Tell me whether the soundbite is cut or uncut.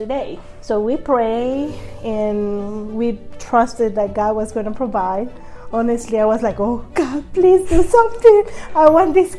uncut